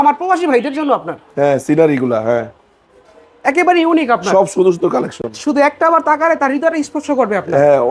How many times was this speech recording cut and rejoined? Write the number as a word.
zero